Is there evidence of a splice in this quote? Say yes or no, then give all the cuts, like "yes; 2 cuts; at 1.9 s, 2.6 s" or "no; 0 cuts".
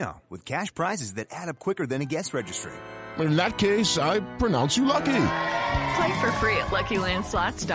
no; 0 cuts